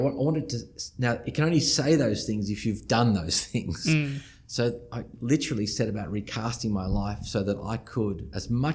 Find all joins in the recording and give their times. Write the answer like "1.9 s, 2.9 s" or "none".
none